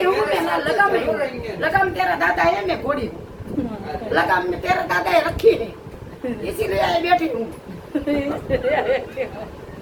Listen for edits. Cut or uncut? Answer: uncut